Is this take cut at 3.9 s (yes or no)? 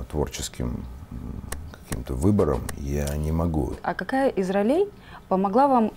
yes